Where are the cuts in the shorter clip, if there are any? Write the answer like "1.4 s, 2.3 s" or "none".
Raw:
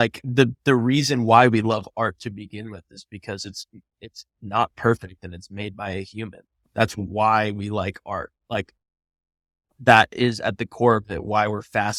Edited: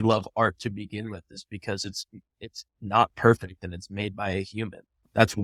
none